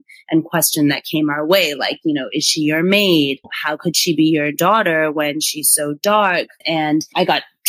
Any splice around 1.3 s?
no; 2 cuts; at 3.5 s, 6.6 s

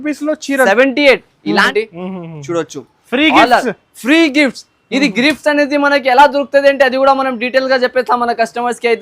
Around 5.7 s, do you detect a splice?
no; 1 cut; at 1.7 s

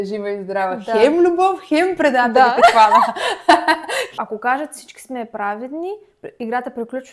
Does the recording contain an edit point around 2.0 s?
no; 1 cut; at 4.0 s

